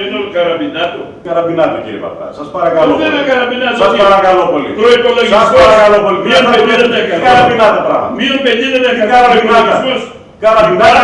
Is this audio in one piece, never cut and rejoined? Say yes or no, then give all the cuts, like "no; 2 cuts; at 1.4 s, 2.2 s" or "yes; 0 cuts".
no; 1 cut; at 1.1 s